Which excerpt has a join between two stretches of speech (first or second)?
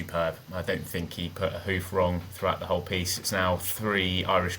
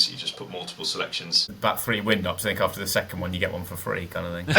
second